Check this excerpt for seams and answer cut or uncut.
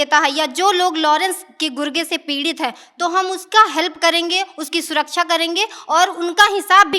uncut